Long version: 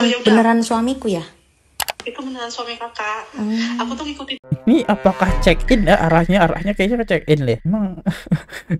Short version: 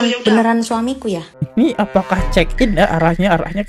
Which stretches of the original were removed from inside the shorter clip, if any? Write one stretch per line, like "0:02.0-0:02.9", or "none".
0:01.4-0:04.5